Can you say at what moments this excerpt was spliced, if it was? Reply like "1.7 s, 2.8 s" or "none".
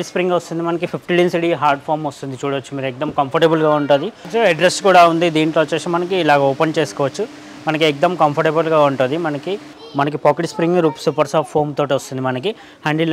4.2 s, 9.7 s